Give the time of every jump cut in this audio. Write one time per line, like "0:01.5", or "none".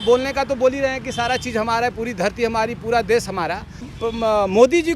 0:03.9